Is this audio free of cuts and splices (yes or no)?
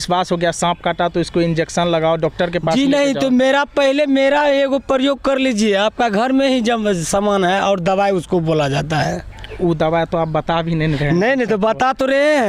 yes